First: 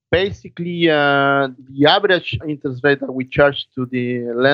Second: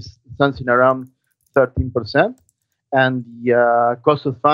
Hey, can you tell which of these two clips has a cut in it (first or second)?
first